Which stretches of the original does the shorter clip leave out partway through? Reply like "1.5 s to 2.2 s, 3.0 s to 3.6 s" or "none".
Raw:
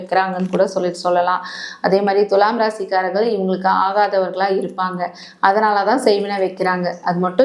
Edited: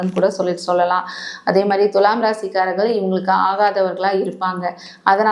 none